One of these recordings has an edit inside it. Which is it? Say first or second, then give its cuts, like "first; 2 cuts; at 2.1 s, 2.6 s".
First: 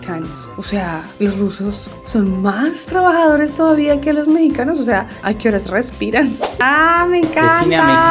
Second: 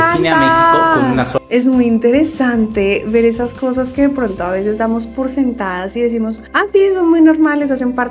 first; 1 cut; at 6.5 s